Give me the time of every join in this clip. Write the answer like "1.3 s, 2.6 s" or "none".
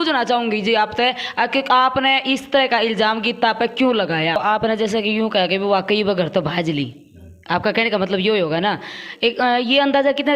4.4 s